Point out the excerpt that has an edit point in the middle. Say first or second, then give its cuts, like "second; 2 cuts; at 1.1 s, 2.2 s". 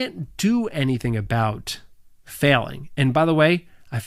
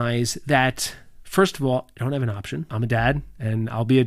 second; 1 cut; at 2.7 s